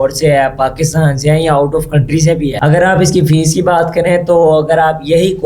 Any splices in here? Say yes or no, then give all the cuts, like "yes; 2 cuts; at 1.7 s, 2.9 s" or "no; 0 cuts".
yes; 1 cut; at 2.6 s